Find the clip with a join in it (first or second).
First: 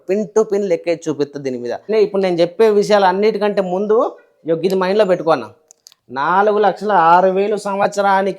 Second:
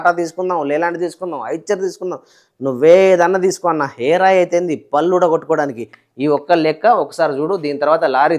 first